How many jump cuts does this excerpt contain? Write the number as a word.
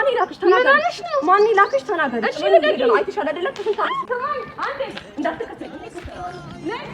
one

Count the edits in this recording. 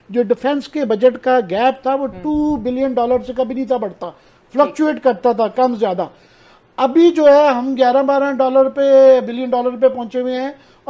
zero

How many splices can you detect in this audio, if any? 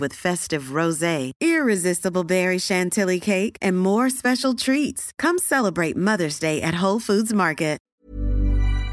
one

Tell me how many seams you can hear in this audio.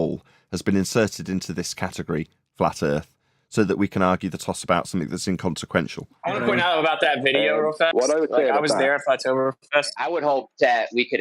two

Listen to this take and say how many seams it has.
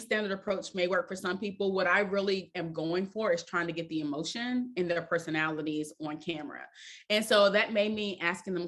zero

